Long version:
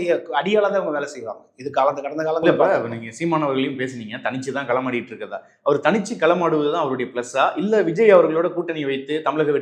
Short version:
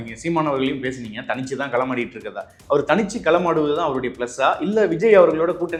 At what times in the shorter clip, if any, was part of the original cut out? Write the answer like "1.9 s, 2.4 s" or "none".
none